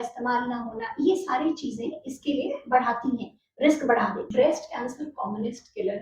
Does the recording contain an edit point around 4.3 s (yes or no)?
yes